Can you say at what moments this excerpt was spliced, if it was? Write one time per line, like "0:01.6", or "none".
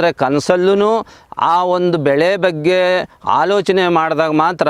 none